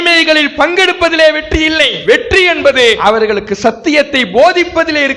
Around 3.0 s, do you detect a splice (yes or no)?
yes